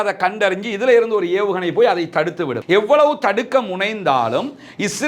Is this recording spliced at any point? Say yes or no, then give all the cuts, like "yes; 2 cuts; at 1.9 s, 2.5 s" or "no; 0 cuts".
yes; 1 cut; at 2.6 s